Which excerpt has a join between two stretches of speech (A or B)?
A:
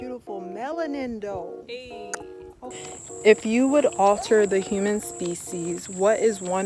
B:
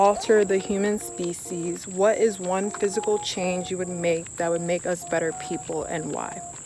A